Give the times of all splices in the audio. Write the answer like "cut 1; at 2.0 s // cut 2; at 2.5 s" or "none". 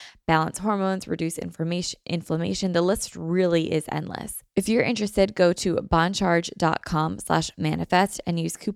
cut 1; at 4.4 s